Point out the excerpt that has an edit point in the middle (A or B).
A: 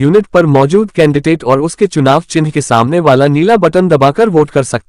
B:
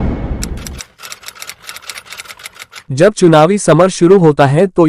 B